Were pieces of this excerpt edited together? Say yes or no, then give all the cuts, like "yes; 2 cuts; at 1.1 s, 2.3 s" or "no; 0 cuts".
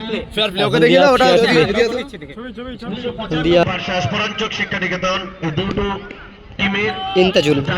yes; 1 cut; at 3.7 s